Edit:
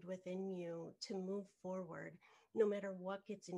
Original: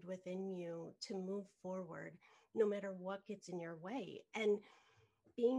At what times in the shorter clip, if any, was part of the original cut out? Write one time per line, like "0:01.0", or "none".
none